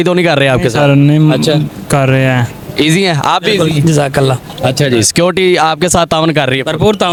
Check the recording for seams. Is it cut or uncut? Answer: uncut